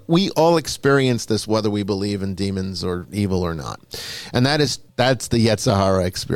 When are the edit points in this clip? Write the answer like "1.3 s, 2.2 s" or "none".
4.8 s